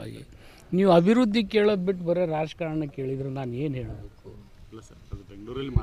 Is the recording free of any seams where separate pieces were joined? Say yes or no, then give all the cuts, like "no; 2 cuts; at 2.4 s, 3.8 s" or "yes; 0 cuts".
yes; 0 cuts